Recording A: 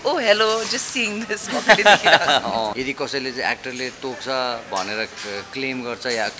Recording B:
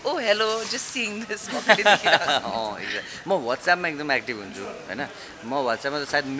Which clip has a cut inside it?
A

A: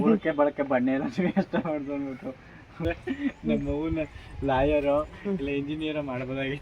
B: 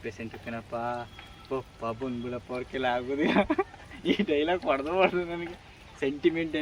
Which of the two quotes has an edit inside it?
A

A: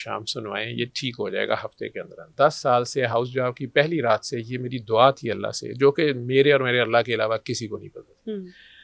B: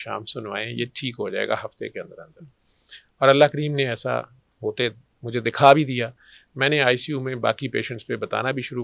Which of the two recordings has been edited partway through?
A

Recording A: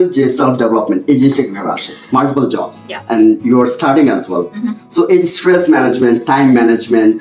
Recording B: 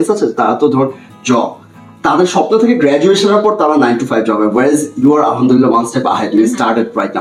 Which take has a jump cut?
A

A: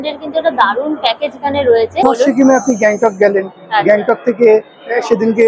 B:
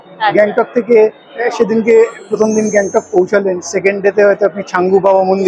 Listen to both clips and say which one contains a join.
A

